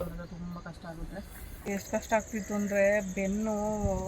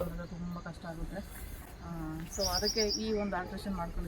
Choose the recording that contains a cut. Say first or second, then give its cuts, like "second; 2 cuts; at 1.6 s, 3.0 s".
first; 1 cut; at 1.7 s